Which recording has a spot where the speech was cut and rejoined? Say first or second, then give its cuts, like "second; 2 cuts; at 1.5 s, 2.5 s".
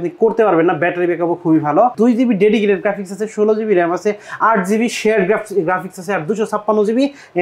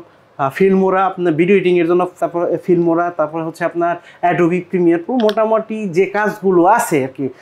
first; 1 cut; at 1.9 s